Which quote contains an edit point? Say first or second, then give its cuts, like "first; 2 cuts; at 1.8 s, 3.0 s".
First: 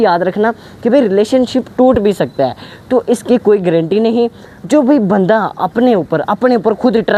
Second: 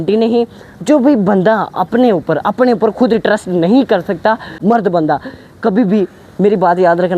second; 1 cut; at 4.5 s